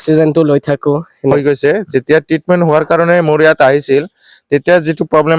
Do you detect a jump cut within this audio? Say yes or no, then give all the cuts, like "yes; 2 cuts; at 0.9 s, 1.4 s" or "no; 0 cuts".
yes; 1 cut; at 1.3 s